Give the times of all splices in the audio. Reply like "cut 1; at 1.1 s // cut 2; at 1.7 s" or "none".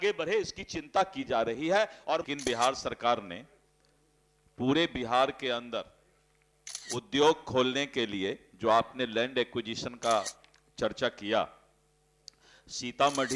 cut 1; at 2.2 s